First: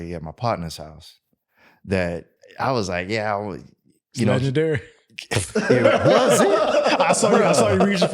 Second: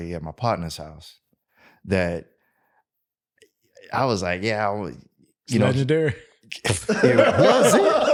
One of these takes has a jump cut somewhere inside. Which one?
first; 1 cut; at 2.4 s

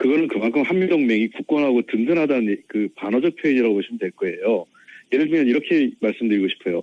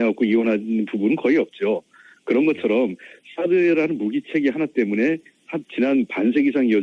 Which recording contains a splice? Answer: first; 1 cut; at 2.6 s

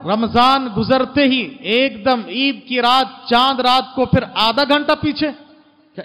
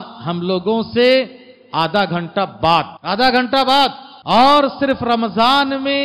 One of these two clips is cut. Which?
second; 2 cuts; at 3.0 s, 4.1 s

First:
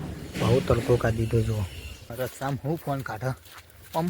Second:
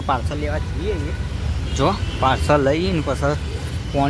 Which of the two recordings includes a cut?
first; 1 cut; at 2.1 s

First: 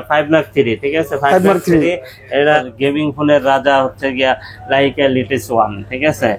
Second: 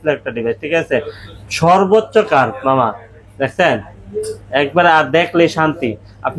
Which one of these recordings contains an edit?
first; 1 cut; at 2.6 s

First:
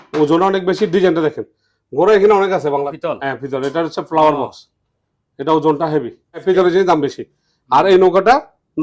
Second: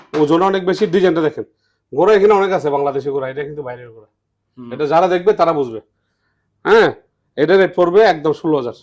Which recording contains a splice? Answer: first; 2 cuts; at 2.9 s, 6.4 s

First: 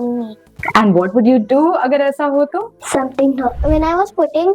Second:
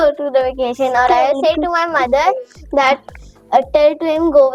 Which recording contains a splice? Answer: first; 2 cuts; at 2.7 s, 3.6 s

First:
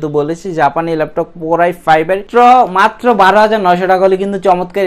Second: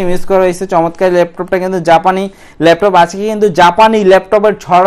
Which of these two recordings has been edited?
first; 1 cut; at 2.2 s

